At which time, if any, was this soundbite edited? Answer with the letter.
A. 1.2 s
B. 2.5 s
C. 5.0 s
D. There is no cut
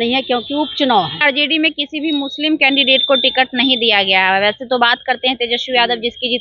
A